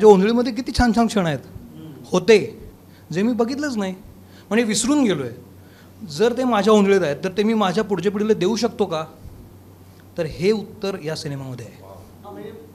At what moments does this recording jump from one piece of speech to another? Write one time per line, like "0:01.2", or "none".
none

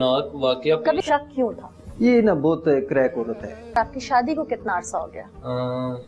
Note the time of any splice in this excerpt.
0:01.0
0:03.8

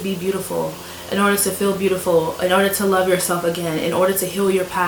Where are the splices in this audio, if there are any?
none

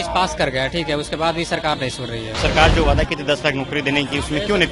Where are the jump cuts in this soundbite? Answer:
0:02.4

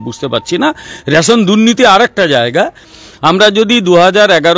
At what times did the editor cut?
0:02.9

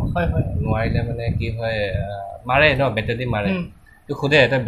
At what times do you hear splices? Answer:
none

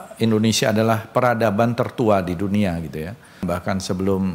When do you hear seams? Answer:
0:03.4

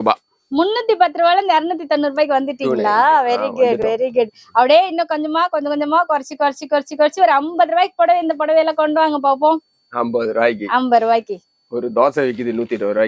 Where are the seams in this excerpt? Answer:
none

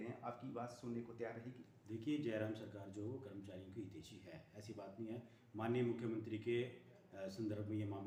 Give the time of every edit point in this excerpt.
none

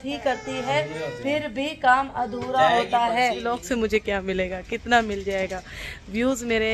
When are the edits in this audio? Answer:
0:03.4

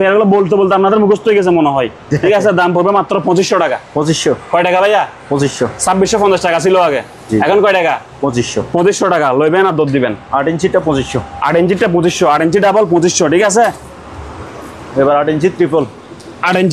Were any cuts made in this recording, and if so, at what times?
none

